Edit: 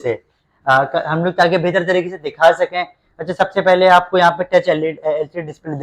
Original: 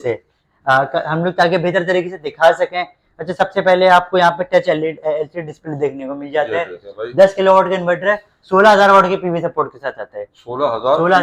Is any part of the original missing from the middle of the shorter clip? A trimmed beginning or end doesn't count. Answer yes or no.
no